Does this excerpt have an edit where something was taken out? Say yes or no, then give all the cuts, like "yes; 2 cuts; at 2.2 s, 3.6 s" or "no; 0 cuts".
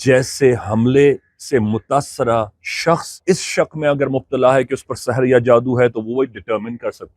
yes; 1 cut; at 3.2 s